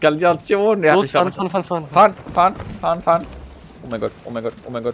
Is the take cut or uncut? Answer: uncut